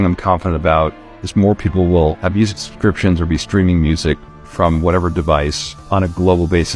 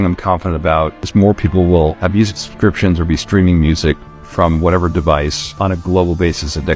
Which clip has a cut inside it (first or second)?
second